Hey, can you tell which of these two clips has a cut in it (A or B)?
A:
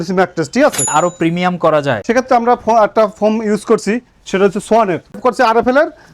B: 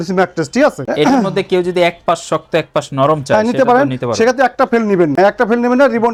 A